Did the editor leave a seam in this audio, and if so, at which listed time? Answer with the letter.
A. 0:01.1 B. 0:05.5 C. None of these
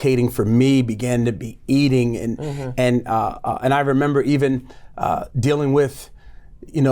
C